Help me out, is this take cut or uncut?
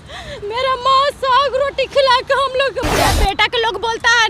cut